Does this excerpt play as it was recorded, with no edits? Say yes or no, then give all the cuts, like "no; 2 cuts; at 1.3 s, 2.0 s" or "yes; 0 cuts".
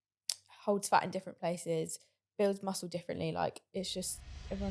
yes; 0 cuts